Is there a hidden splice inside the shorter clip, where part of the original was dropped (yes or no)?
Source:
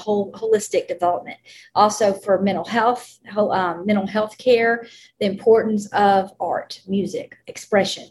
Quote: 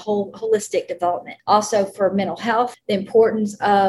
yes